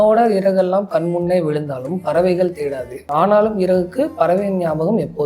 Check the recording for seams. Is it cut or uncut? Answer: cut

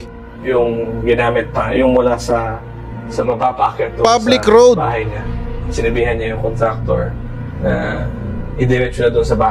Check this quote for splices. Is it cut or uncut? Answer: uncut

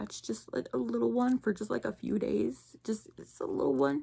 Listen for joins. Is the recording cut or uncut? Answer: uncut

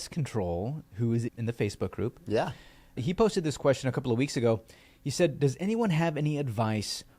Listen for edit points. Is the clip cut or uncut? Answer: cut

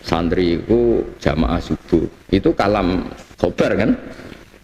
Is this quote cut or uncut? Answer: cut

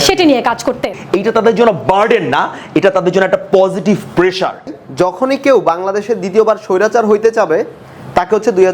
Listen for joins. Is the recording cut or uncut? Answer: cut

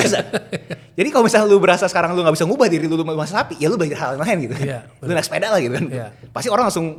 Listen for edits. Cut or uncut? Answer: uncut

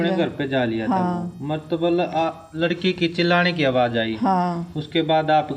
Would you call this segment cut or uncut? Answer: uncut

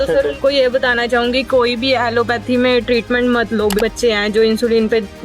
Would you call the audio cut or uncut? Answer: cut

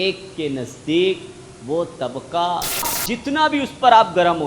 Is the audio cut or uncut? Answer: cut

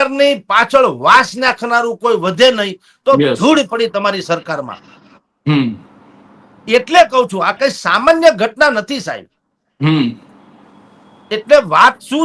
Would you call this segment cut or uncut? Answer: uncut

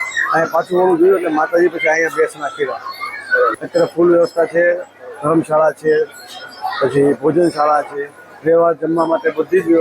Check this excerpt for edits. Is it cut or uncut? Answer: cut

